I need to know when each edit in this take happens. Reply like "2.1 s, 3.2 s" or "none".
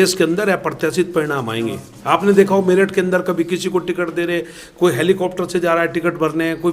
none